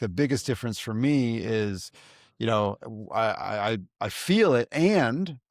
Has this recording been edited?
no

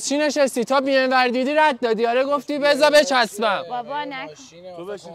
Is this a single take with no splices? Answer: yes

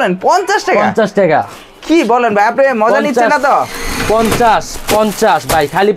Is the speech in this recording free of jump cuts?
yes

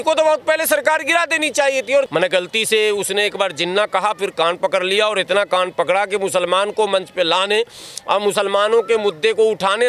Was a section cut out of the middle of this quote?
yes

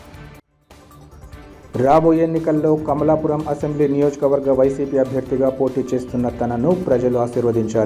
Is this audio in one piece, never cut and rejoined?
no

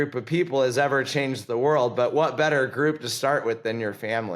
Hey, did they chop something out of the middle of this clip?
no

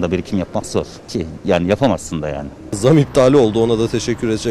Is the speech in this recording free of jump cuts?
no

